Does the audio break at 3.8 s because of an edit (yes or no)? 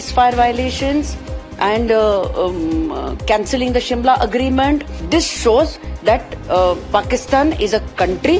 no